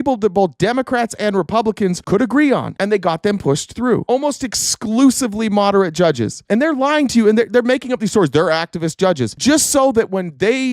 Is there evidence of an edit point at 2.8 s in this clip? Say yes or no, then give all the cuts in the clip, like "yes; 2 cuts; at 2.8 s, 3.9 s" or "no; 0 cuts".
no; 1 cut; at 4.0 s